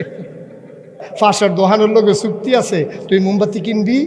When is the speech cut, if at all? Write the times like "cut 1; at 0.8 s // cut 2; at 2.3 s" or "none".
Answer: cut 1; at 1.1 s

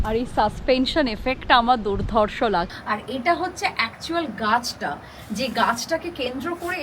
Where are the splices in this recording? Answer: cut 1; at 2.7 s

